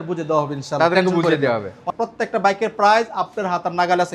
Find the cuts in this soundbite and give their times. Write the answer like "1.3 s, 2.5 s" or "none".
1.8 s